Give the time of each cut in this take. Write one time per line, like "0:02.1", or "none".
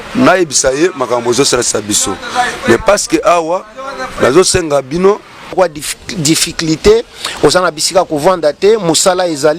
0:05.5